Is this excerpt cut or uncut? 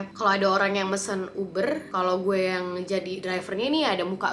uncut